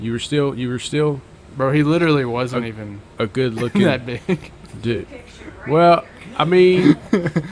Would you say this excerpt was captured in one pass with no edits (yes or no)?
yes